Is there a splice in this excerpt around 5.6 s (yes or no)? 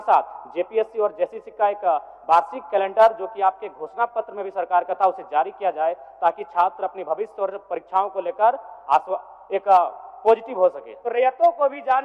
no